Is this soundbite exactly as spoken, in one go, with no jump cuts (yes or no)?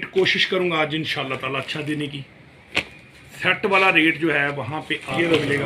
yes